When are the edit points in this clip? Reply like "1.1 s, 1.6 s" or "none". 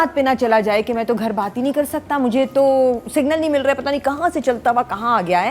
none